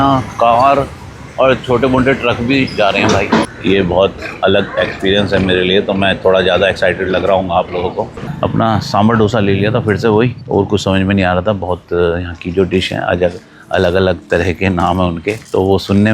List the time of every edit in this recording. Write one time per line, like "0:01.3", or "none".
0:03.5
0:08.2